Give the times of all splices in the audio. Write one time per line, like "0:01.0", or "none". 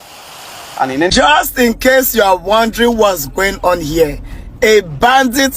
0:01.1

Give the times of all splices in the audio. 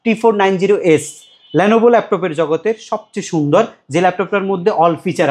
none

